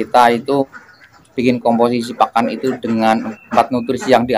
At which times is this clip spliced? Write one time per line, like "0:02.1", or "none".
0:01.1